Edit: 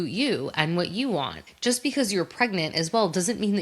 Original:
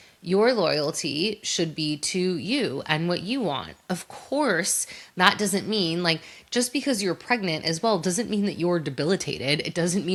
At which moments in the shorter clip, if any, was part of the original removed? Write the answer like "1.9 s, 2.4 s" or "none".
1.4 s